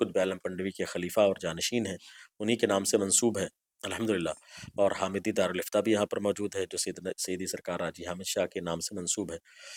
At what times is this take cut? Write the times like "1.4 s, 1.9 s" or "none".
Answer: none